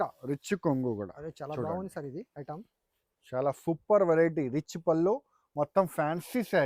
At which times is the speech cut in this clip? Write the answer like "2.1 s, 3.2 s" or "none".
none